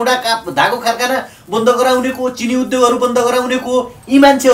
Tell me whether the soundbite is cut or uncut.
uncut